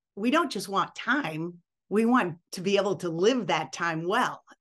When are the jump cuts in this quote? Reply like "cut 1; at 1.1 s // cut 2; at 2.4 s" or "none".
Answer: cut 1; at 2.4 s